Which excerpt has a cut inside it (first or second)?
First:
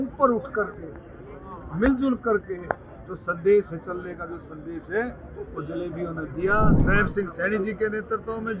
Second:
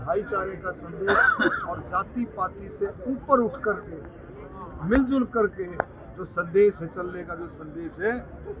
first